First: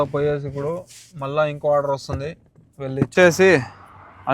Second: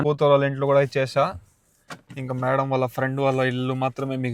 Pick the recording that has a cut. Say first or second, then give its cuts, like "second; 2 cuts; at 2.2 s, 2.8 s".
first; 1 cut; at 3.1 s